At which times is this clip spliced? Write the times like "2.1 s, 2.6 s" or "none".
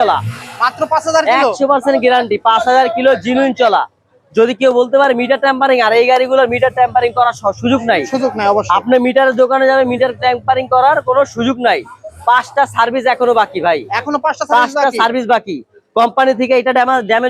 none

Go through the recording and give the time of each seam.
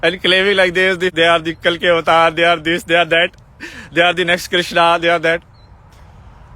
1.1 s

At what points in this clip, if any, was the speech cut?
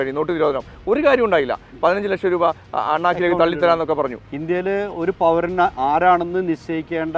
4.2 s

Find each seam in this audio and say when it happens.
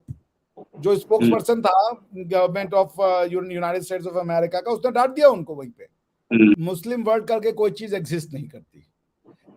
6.6 s

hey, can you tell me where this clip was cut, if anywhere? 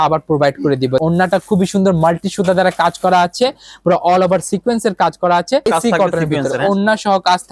1.0 s, 5.7 s

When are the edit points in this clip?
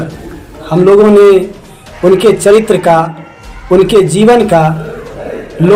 none

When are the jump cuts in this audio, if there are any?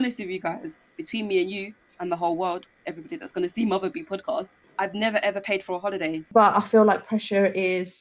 4.6 s, 6.3 s

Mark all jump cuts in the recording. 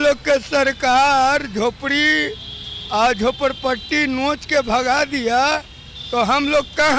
none

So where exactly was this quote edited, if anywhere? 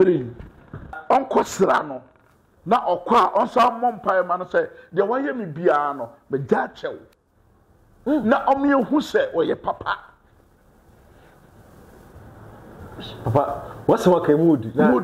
1.0 s

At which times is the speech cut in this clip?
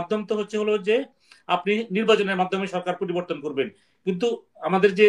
none

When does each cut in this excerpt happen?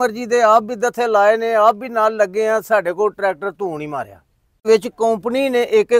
4.7 s

